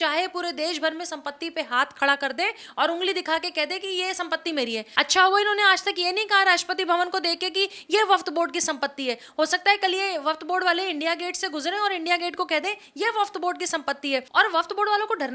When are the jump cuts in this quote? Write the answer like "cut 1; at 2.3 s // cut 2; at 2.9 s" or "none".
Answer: cut 1; at 4.9 s // cut 2; at 14.3 s